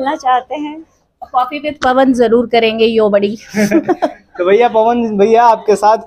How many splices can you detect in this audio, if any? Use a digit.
0